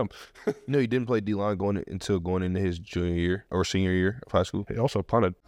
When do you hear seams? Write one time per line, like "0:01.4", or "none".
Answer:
0:03.4
0:04.6